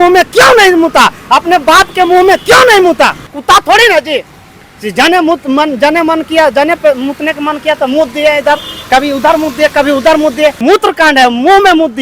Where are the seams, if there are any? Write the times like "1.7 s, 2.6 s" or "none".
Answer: 3.3 s, 10.6 s